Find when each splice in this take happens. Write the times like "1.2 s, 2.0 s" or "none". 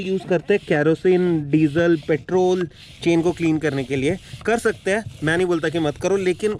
none